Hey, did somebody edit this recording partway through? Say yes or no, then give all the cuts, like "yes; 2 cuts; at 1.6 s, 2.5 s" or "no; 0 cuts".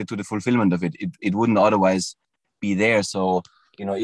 no; 0 cuts